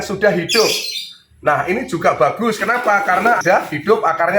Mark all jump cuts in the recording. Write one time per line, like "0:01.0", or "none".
0:03.4